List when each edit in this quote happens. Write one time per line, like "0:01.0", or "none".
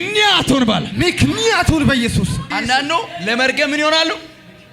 0:02.4